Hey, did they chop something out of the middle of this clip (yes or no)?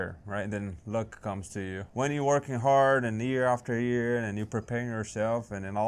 yes